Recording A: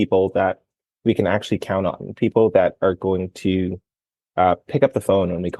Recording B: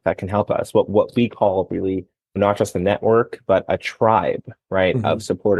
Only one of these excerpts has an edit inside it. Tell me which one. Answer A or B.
B